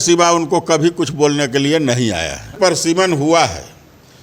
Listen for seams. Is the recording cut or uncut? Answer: cut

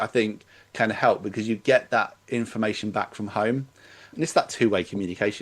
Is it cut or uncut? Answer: cut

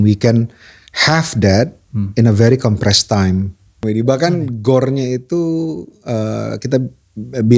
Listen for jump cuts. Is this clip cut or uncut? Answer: cut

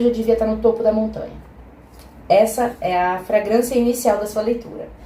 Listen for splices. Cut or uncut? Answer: uncut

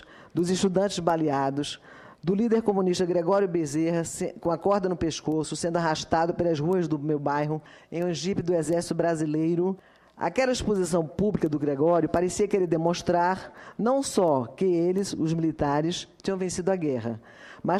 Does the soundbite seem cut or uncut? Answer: uncut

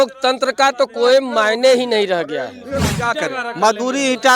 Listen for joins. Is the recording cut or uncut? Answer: cut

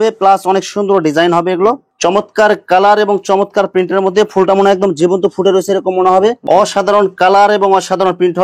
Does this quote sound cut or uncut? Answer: cut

